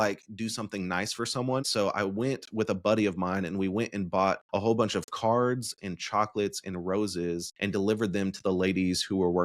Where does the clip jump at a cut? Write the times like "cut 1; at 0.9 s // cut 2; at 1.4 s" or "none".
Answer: cut 1; at 1.7 s // cut 2; at 4.4 s // cut 3; at 7.5 s